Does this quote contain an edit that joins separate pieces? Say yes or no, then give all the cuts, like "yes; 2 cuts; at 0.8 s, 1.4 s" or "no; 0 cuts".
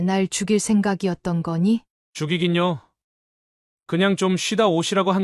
yes; 1 cut; at 2.0 s